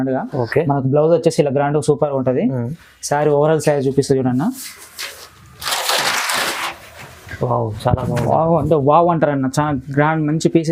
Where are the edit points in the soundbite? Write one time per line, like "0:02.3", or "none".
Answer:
none